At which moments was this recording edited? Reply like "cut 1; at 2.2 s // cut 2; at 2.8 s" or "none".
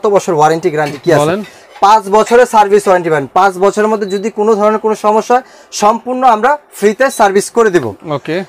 none

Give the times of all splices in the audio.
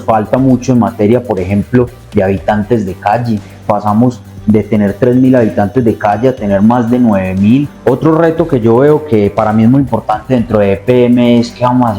cut 1; at 3.6 s // cut 2; at 7.7 s

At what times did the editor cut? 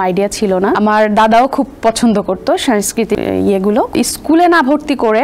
cut 1; at 0.8 s // cut 2; at 3.2 s // cut 3; at 3.9 s

